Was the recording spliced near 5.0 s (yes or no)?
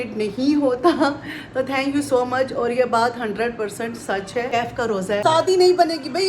yes